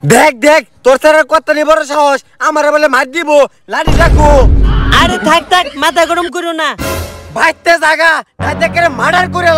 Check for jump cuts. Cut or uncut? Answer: uncut